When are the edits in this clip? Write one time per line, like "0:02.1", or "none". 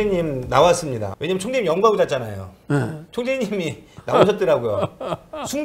0:01.0